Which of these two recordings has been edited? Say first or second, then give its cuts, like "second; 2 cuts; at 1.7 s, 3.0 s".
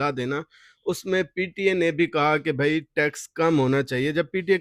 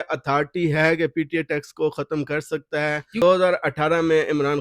second; 1 cut; at 3.2 s